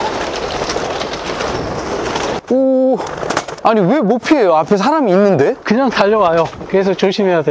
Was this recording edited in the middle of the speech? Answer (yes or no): yes